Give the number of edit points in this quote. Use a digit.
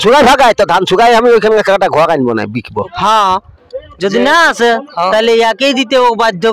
1